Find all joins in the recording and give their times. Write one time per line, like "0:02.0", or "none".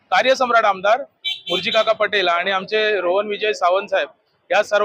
none